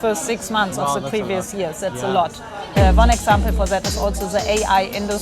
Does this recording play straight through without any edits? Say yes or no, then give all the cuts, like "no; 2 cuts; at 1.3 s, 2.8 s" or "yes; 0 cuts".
no; 1 cut; at 2.7 s